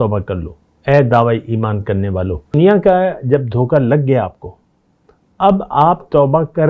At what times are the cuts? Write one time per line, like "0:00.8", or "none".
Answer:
0:02.6